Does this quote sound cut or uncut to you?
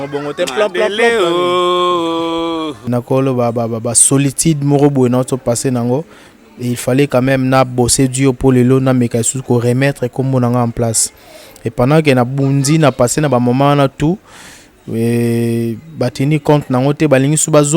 cut